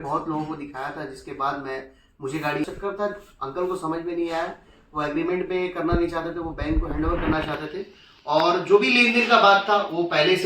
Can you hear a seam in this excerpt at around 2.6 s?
yes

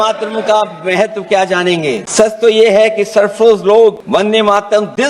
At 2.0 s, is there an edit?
yes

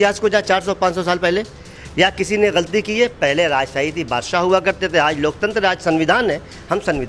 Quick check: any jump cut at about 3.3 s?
no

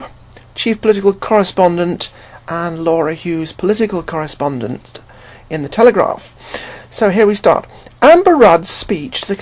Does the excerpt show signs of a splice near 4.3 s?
yes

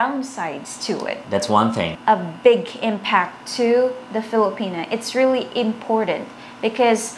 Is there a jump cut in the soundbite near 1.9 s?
yes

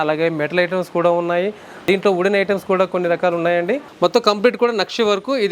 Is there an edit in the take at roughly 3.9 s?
yes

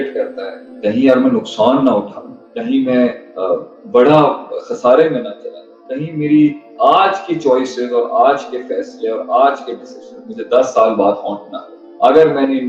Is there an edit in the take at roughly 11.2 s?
no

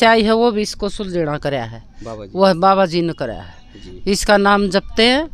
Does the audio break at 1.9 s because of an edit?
no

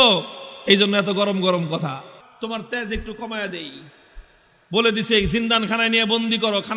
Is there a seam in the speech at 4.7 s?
no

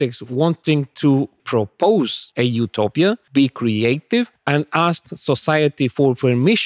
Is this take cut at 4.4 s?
yes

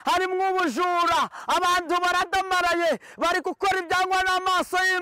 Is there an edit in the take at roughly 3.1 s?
no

